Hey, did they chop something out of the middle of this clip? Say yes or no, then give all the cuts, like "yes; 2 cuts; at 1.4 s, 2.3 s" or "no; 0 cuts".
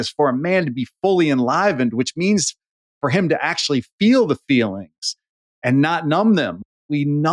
no; 0 cuts